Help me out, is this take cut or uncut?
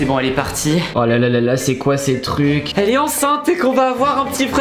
cut